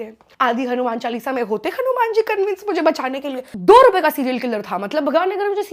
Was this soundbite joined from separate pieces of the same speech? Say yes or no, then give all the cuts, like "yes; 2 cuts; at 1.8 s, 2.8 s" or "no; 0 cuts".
yes; 1 cut; at 3.5 s